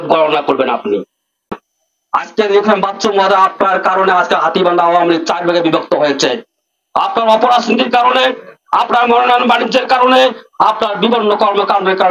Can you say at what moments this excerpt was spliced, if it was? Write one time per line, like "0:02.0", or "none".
0:01.5